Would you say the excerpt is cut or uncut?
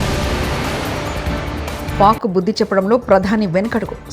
cut